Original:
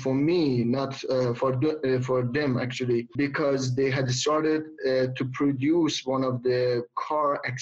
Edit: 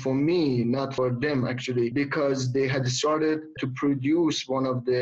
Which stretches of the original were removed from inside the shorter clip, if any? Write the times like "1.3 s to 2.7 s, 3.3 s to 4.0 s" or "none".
0.9 s to 2.0 s, 3.0 s to 3.1 s, 4.8 s to 5.1 s